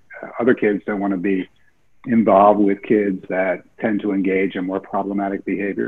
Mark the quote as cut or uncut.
uncut